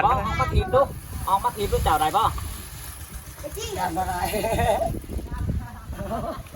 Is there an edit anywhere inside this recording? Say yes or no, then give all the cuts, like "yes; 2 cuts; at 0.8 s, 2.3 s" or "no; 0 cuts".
yes; 1 cut; at 5.3 s